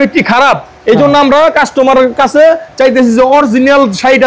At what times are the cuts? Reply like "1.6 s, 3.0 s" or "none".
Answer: none